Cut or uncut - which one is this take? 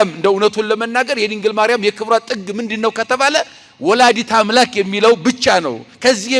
uncut